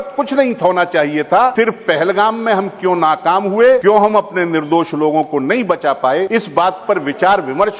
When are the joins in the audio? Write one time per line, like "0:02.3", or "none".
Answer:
0:01.5
0:03.8
0:06.3